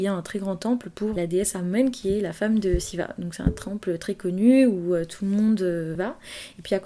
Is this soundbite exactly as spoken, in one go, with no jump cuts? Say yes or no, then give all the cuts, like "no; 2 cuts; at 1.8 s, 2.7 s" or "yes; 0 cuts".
no; 2 cuts; at 1.1 s, 5.9 s